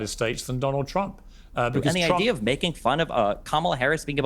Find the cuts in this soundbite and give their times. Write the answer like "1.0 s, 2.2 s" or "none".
1.7 s